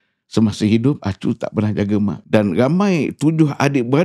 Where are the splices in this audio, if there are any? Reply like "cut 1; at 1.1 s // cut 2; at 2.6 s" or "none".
cut 1; at 2.2 s